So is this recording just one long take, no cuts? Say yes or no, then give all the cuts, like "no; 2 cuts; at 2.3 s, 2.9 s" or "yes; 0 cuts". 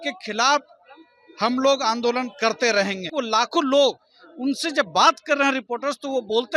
no; 1 cut; at 3.1 s